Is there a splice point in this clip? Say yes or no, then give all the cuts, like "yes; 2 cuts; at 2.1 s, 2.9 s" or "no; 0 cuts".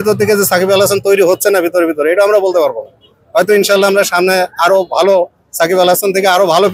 no; 0 cuts